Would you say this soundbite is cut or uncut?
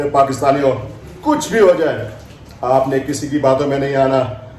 uncut